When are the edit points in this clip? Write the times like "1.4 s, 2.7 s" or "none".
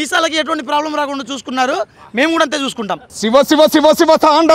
3.1 s

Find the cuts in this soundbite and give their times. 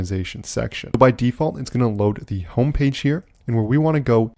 0.9 s

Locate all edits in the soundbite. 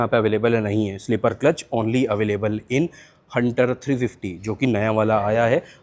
none

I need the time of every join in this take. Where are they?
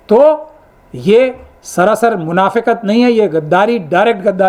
none

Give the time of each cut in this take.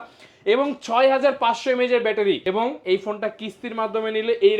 2.4 s

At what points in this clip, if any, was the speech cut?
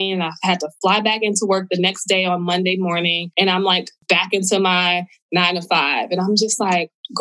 3.2 s, 3.9 s

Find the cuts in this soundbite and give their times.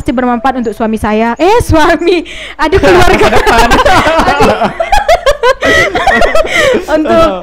none

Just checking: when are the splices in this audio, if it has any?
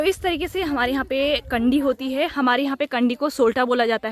none

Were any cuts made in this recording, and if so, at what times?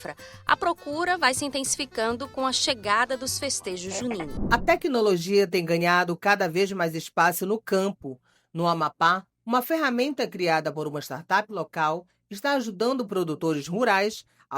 4.2 s

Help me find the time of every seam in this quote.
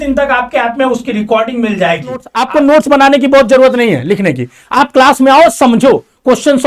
2.4 s

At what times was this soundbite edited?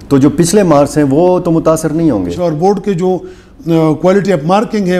2.3 s

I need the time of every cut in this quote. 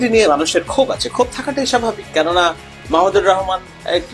none

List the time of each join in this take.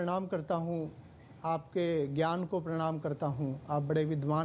none

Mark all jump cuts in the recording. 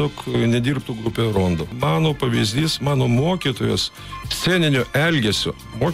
1.7 s

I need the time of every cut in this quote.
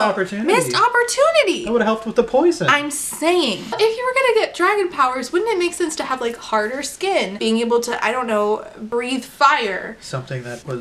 3.7 s

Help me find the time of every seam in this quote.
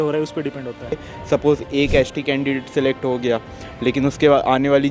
0.9 s

